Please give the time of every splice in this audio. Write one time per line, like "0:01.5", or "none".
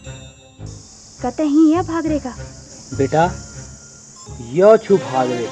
none